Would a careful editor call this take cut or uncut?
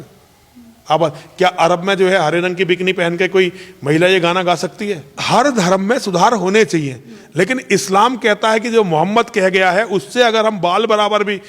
cut